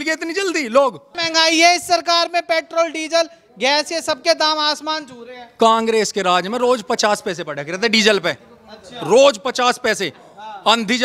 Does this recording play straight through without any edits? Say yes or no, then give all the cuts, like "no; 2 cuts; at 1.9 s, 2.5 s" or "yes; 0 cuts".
no; 1 cut; at 1.1 s